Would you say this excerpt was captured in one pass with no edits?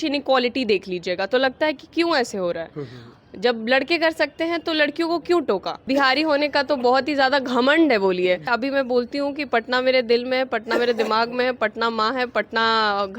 no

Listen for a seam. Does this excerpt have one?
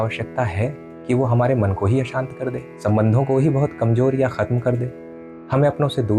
yes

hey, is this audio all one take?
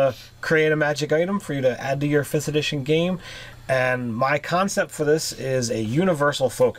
no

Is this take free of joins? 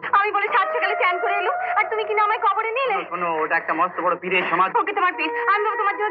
yes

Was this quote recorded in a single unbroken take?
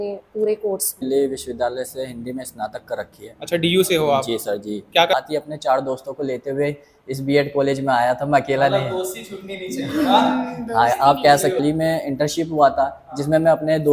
no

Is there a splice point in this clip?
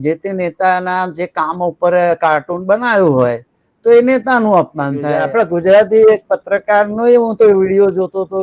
yes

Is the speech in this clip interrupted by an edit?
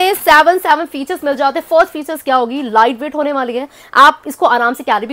no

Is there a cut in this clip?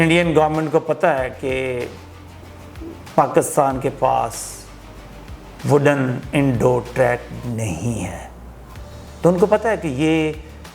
no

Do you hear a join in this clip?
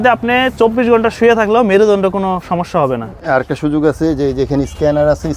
yes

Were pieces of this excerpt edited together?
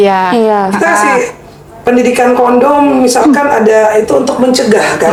no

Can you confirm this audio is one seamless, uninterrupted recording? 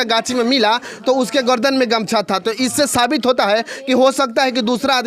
yes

